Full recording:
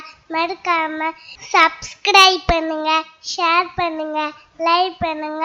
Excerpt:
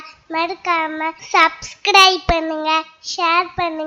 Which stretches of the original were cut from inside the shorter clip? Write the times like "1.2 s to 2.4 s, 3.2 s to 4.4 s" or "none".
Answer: 1.2 s to 1.4 s